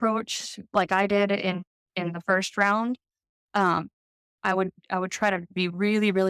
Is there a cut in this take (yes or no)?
no